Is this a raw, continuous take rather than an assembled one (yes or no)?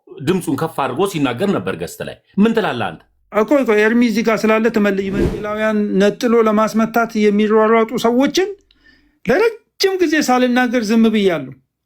no